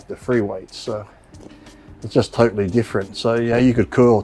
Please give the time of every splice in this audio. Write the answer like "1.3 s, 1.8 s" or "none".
none